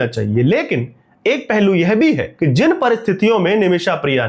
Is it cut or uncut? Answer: cut